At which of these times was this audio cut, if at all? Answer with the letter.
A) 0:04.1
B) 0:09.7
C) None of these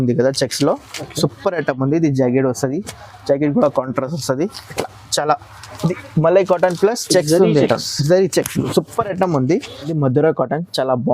B